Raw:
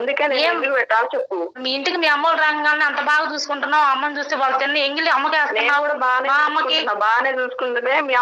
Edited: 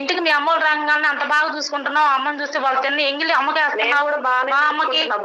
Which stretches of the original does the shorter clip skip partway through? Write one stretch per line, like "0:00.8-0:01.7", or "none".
none